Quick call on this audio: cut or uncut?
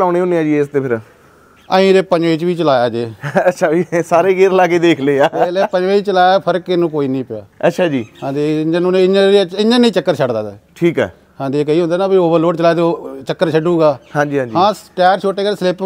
uncut